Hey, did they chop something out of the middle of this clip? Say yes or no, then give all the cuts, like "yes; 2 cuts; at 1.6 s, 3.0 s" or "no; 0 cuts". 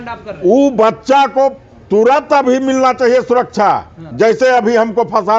yes; 1 cut; at 4.0 s